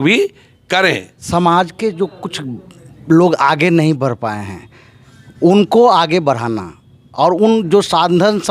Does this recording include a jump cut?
yes; 1 cut; at 1.3 s

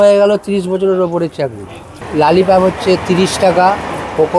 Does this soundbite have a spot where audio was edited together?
yes; 1 cut; at 2.0 s

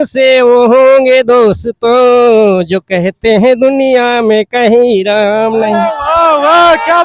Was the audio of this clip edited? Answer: no; 0 cuts

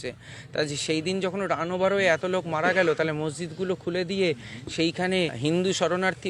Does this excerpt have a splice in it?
yes; 1 cut; at 5.4 s

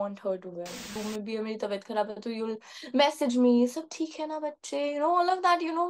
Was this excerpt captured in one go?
no; 1 cut; at 1.0 s

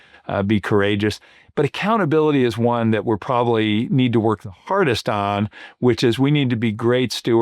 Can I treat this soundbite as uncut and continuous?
yes; 0 cuts

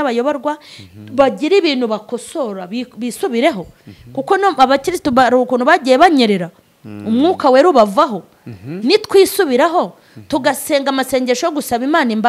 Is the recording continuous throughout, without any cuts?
yes; 0 cuts

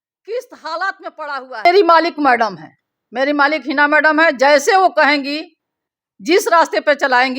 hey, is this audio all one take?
no; 1 cut; at 1.6 s

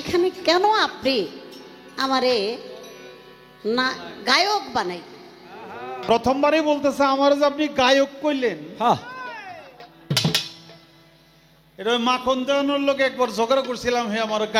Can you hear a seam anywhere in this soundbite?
yes; 1 cut; at 6.1 s

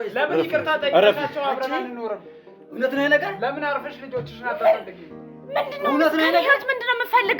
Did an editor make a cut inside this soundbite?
no; 0 cuts

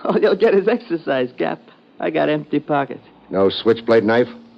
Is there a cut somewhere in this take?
yes; 1 cut; at 2.4 s

